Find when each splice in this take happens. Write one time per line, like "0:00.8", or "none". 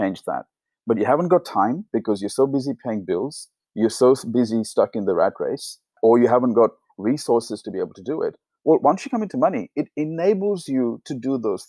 0:06.0